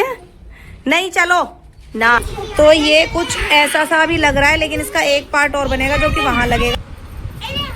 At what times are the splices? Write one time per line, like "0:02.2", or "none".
0:02.4
0:06.7